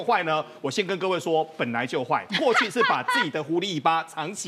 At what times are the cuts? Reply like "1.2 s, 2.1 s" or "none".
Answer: none